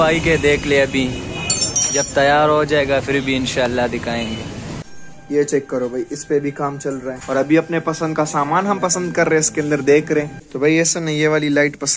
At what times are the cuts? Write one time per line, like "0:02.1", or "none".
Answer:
0:04.5
0:07.2
0:10.4